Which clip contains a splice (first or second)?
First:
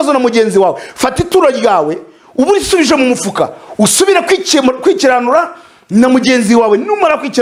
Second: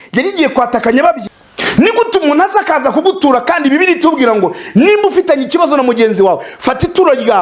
second